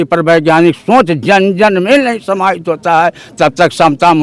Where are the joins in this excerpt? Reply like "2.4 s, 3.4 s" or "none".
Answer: none